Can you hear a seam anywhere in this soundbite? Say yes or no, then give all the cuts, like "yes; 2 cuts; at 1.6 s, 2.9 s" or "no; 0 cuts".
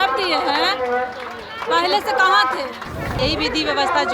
yes; 1 cut; at 3.2 s